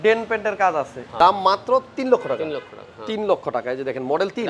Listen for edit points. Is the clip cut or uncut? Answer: cut